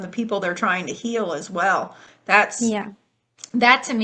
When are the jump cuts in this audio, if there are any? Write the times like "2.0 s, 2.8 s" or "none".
none